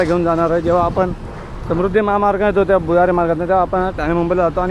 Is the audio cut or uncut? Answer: uncut